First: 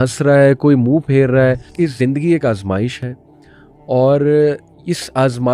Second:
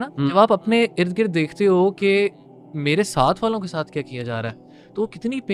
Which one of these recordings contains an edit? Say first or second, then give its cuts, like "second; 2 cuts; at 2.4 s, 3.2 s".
first; 1 cut; at 1.7 s